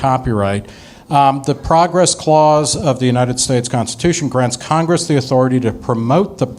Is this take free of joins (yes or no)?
no